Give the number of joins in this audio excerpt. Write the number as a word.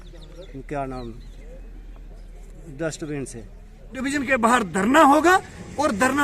one